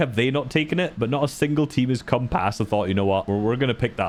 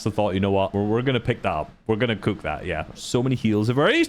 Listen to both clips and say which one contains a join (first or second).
second